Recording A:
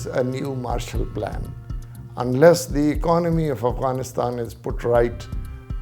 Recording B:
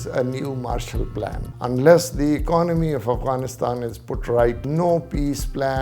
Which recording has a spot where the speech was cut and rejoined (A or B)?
B